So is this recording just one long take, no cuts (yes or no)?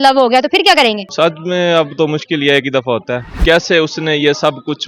no